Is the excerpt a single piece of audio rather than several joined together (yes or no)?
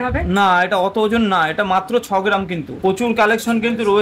no